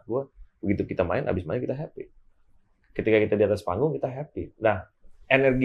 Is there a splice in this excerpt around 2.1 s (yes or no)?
no